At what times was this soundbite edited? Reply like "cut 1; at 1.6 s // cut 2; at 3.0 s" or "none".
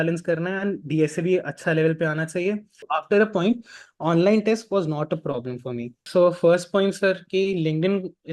cut 1; at 2.8 s // cut 2; at 6.0 s